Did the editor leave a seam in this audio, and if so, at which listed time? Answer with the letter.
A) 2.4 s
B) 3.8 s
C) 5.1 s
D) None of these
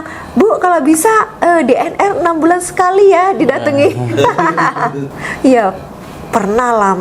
C